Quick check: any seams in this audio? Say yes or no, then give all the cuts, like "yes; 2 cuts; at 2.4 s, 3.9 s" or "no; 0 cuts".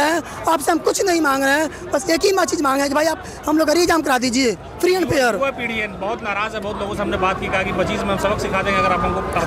no; 0 cuts